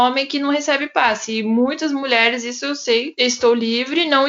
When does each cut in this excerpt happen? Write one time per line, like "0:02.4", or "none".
0:03.1